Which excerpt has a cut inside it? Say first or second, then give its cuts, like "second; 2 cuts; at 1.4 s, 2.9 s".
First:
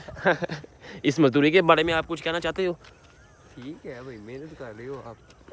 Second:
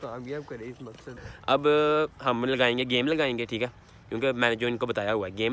second; 1 cut; at 1.1 s